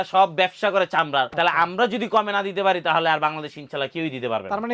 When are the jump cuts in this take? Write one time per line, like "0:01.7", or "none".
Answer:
0:01.3

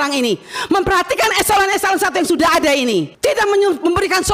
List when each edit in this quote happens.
0:03.1

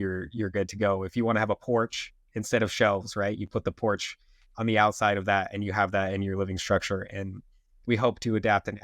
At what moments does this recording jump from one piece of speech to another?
none

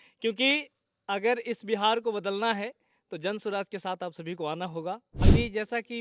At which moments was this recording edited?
0:05.1

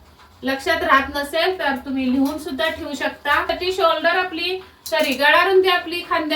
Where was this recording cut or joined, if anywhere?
0:03.5

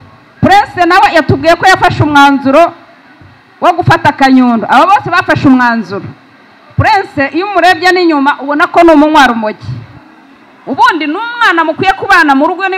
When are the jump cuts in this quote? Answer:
none

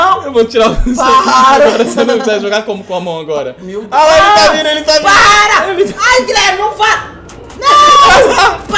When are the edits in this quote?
none

